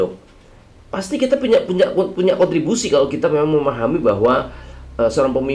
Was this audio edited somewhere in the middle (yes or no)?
no